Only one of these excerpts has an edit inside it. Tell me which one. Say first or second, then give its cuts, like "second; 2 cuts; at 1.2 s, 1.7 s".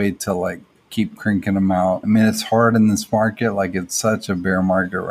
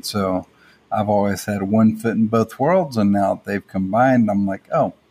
first; 1 cut; at 2.0 s